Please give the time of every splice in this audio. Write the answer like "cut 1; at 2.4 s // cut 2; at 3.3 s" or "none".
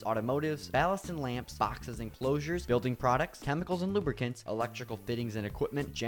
none